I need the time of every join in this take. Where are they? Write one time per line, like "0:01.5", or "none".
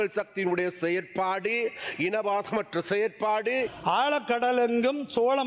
0:03.5